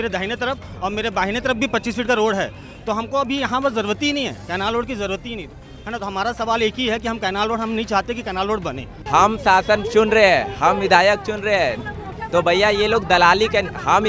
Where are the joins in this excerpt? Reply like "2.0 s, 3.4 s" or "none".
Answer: 5.6 s, 9.0 s